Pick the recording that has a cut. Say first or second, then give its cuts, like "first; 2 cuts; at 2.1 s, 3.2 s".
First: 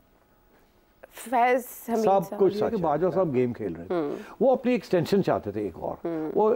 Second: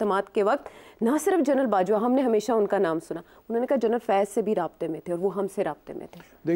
first; 1 cut; at 2.7 s